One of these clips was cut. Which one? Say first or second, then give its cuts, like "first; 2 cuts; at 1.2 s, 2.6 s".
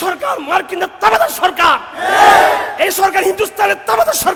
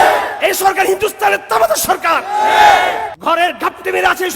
second; 1 cut; at 3.1 s